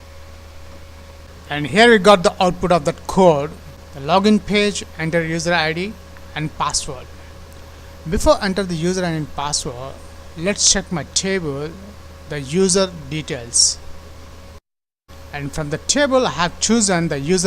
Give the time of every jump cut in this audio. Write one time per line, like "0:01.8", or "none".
0:01.3